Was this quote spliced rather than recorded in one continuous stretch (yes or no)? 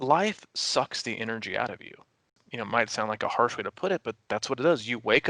yes